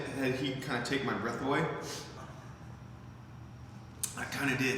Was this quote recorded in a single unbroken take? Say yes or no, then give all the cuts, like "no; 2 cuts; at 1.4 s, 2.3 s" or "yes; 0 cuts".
no; 1 cut; at 2.2 s